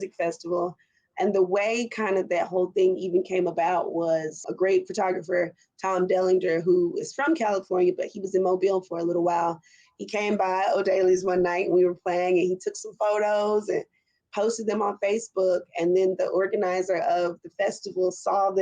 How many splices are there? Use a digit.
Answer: 1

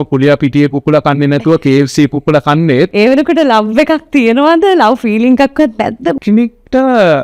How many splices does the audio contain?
2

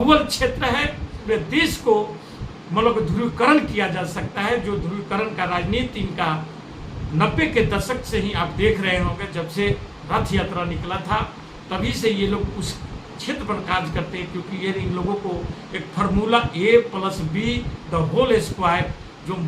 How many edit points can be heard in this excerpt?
1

